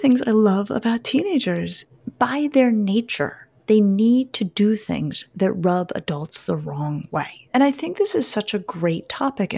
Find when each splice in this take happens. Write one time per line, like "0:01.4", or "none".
0:01.8
0:07.5